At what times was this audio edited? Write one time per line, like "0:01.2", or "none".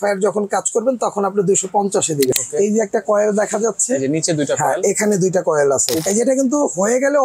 0:02.3
0:06.0